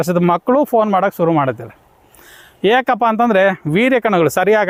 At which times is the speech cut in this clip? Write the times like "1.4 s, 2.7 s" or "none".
none

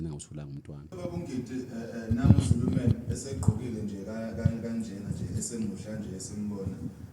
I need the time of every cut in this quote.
0.9 s

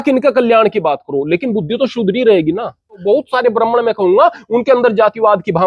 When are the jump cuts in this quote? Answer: 3.0 s

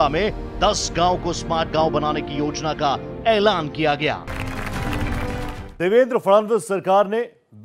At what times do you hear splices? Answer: 3.1 s, 4.4 s

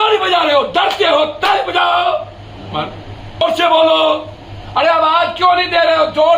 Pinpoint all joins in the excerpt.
3.4 s

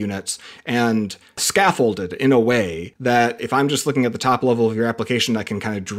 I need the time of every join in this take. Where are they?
1.4 s, 3.2 s

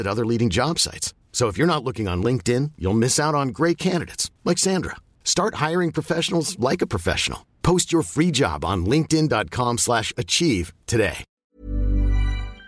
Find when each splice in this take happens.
11.4 s

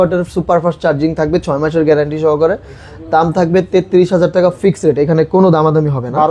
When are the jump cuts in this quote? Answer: none

